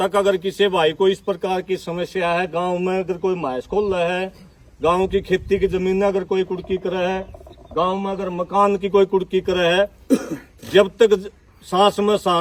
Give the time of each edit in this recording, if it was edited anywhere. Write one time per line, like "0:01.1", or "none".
none